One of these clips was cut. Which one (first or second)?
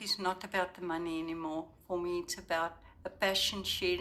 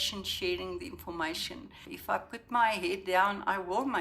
second